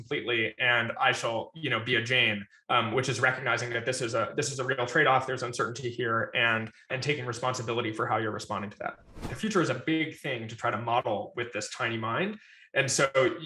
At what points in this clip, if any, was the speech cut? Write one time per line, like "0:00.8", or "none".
0:06.9
0:09.3